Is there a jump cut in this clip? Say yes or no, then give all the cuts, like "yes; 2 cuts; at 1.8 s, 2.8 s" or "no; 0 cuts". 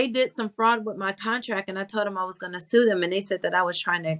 no; 0 cuts